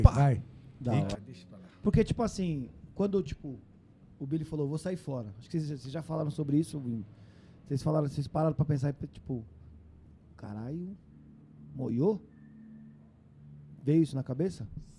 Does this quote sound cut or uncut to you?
cut